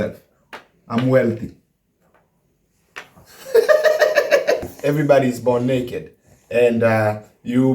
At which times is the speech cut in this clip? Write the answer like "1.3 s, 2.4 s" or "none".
4.6 s